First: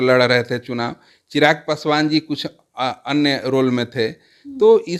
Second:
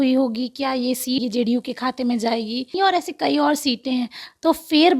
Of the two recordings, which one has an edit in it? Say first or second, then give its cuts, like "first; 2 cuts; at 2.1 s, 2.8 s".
second; 2 cuts; at 1.2 s, 2.8 s